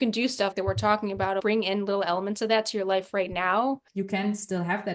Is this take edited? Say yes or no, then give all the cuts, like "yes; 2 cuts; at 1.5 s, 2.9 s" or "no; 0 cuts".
yes; 2 cuts; at 1.4 s, 3.9 s